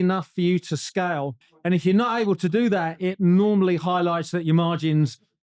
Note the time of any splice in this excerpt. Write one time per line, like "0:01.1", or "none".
none

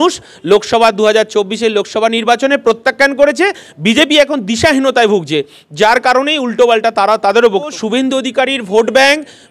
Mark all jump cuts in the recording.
0:07.8

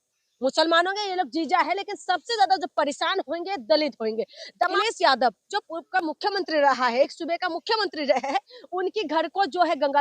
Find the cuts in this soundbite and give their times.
0:04.7

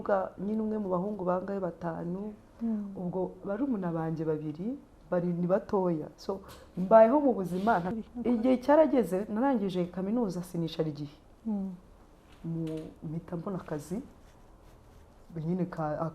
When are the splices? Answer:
0:07.9

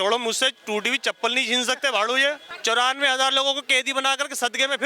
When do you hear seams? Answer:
0:02.5

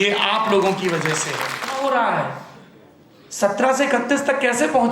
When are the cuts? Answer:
0:01.7

